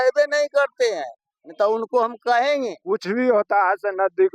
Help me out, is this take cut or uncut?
cut